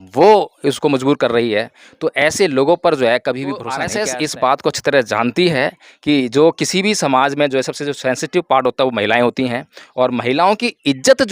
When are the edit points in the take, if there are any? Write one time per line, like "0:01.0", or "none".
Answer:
0:03.8